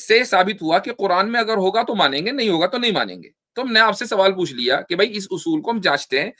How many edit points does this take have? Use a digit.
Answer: 0